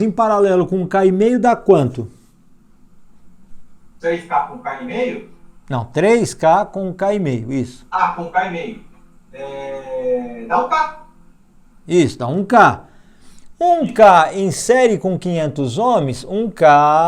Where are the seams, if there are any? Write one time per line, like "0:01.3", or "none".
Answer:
none